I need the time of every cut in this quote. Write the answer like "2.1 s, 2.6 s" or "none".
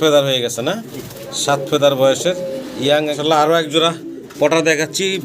3.2 s